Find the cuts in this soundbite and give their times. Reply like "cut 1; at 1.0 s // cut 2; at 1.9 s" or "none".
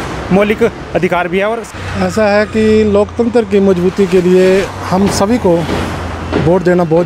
cut 1; at 1.6 s